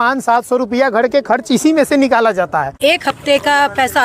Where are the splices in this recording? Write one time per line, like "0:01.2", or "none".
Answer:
0:02.8

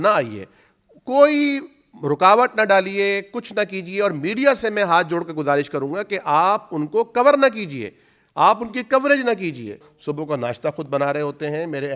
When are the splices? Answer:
0:09.9

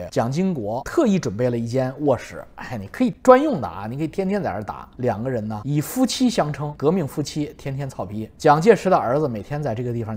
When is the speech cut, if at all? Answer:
0:00.8
0:05.0

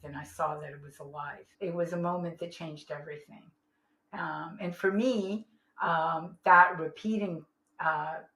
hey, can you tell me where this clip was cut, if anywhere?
0:01.4

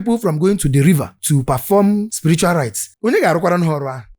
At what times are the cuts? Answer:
0:02.1

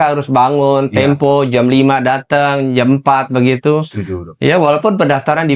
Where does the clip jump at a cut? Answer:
none

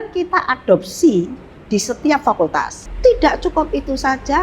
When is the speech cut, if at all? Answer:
0:02.8

